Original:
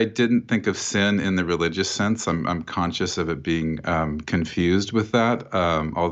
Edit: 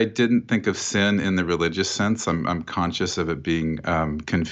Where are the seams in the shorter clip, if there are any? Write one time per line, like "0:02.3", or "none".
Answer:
none